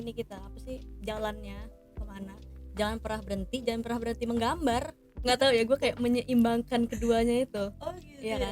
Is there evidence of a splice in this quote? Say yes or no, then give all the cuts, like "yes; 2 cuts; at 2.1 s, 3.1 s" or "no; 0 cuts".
yes; 1 cut; at 5.2 s